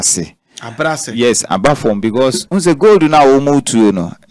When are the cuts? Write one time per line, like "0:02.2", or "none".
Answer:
0:02.4